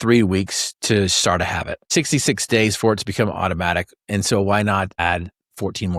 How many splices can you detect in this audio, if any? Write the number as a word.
zero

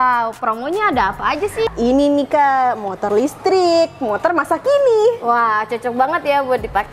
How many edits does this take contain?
one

